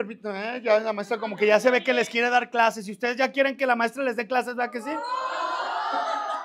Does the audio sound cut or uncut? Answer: uncut